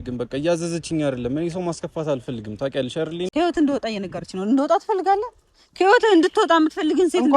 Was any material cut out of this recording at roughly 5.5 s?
no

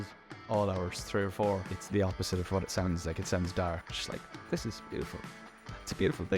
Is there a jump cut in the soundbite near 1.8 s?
yes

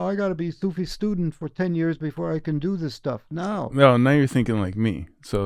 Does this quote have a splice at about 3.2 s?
no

